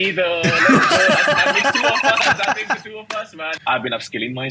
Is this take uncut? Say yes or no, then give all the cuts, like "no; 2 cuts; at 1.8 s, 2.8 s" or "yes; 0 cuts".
no; 1 cut; at 3.5 s